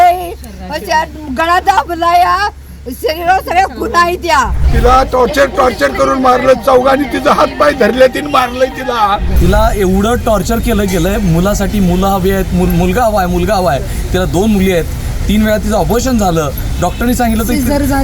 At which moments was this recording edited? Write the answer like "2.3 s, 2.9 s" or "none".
4.6 s, 9.3 s